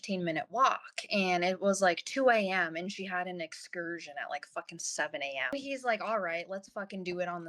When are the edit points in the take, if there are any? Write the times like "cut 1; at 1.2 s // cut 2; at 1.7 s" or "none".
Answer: cut 1; at 5.5 s